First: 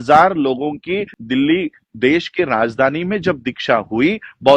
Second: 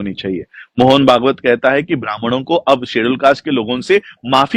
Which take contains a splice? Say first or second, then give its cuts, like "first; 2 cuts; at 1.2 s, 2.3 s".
first; 1 cut; at 1.2 s